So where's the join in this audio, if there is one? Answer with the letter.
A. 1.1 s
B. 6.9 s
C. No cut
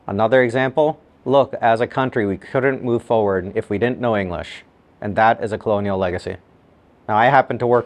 A